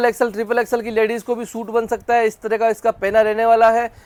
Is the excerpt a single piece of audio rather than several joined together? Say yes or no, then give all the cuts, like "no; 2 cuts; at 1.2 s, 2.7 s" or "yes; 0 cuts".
yes; 0 cuts